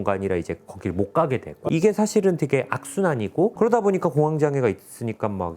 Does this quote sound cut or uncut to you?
cut